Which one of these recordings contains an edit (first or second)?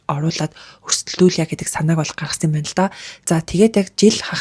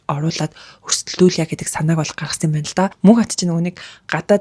second